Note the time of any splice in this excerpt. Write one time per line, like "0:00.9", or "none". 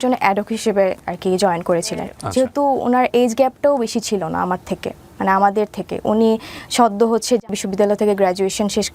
0:02.2
0:07.6